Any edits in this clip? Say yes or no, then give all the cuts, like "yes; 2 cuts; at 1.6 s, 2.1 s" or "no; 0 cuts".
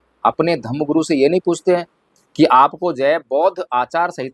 no; 0 cuts